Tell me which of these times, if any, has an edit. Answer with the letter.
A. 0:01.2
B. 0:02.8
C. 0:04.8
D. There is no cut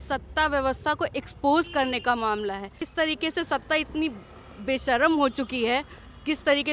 B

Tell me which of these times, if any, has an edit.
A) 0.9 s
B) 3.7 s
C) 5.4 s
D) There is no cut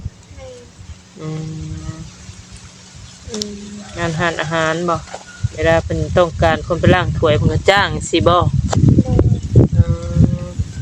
D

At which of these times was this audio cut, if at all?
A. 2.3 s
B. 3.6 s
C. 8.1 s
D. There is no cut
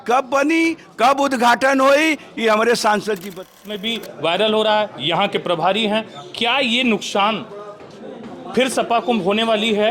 B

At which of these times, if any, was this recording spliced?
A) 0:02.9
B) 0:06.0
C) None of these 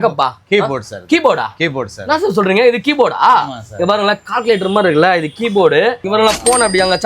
B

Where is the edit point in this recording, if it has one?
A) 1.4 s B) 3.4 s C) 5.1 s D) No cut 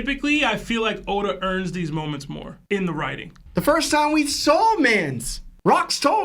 B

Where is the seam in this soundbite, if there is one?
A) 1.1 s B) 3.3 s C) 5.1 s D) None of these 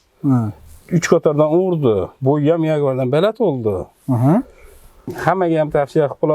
C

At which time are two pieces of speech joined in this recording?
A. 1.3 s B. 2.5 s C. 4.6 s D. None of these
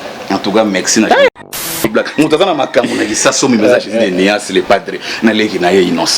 A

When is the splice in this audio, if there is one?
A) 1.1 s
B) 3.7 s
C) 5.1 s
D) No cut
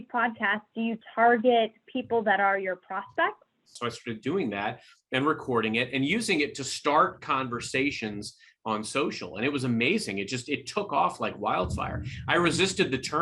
B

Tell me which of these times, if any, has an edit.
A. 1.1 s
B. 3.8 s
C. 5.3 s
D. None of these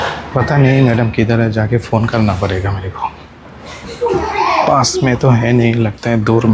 B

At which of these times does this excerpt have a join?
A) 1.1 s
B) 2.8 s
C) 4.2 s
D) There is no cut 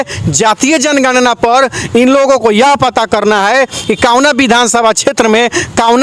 D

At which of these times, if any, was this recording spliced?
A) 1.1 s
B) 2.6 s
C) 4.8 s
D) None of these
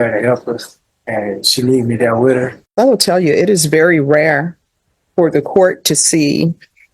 B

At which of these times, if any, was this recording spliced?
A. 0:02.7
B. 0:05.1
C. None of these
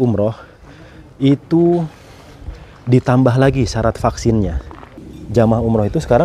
B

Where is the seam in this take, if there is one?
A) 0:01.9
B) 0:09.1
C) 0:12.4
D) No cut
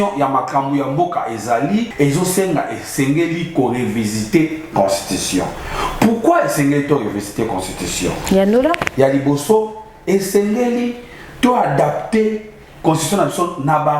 A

